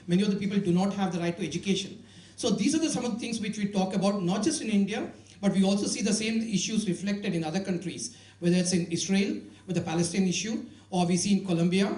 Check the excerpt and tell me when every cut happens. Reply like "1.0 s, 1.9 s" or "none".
none